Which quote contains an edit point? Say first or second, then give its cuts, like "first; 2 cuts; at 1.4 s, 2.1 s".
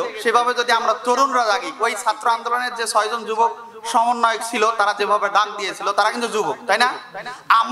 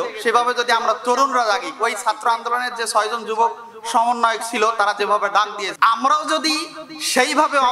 second; 1 cut; at 5.6 s